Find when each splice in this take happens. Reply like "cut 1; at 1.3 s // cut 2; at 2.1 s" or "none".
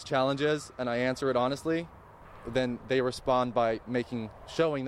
none